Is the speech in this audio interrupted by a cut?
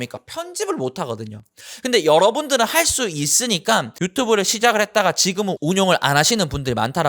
yes; 1 cut; at 3.9 s

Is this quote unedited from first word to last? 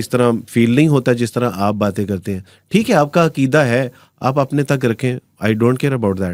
yes; 0 cuts

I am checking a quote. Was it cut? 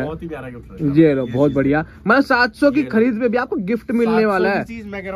no; 0 cuts

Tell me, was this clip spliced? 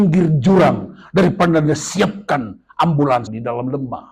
no; 0 cuts

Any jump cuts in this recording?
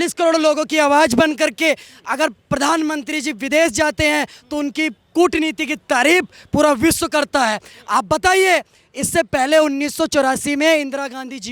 no; 0 cuts

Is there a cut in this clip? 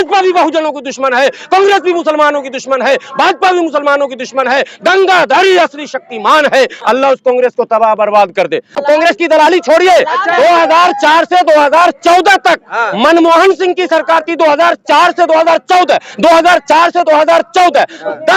yes; 2 cuts; at 6.8 s, 8.8 s

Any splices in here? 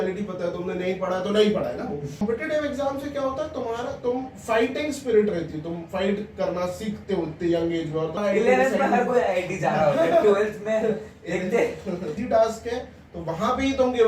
yes; 3 cuts; at 2.2 s, 8.2 s, 12.2 s

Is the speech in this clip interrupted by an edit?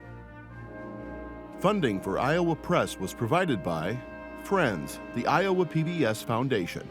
yes; 1 cut; at 1.6 s

